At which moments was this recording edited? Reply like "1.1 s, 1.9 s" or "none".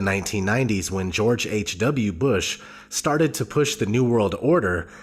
3.4 s

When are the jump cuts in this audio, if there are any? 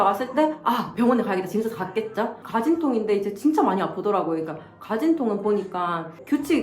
2.4 s

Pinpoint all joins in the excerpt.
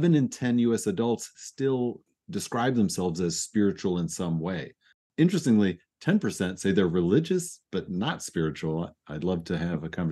5.1 s

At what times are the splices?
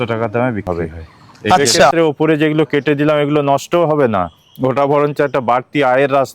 1.9 s

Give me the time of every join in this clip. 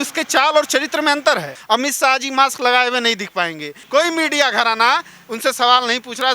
1.5 s, 3.7 s

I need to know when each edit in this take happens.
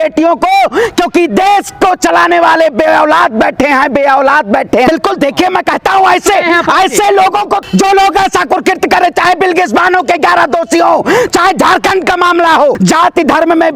4.9 s, 12.8 s

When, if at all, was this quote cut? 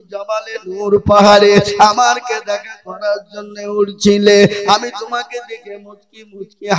none

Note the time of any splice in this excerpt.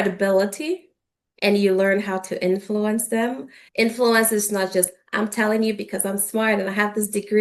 3.6 s

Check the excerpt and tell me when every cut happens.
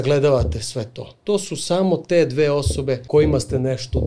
3.0 s

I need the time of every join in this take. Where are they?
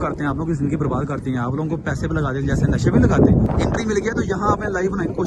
3.5 s

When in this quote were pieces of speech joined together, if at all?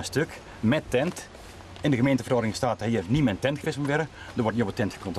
none

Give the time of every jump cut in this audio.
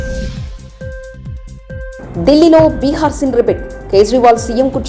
2.0 s

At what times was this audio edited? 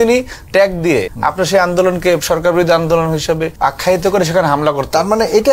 1.1 s, 3.5 s

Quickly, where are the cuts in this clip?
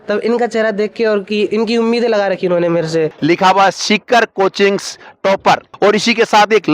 3.1 s, 5.7 s

